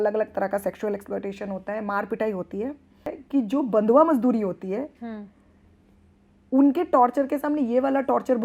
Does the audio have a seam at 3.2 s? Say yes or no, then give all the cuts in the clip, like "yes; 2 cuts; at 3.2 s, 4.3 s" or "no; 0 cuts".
yes; 1 cut; at 3.2 s